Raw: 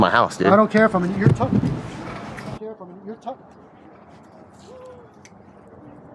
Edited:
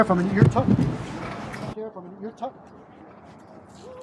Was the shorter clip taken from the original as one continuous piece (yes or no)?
yes